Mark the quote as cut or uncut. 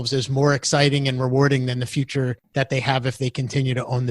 cut